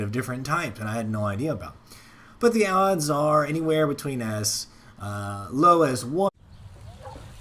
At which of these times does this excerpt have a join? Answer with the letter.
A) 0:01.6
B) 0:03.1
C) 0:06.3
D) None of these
D